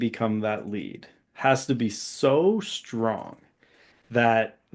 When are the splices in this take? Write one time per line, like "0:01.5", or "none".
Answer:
none